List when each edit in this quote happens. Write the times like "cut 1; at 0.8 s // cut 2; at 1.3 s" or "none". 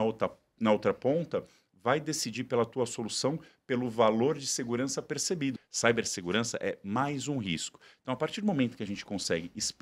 cut 1; at 5.7 s